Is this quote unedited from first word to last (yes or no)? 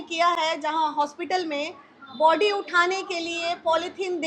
yes